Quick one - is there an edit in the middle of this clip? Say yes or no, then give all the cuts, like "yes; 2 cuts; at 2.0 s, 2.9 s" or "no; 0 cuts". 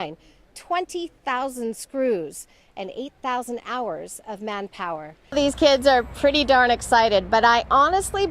yes; 1 cut; at 5.2 s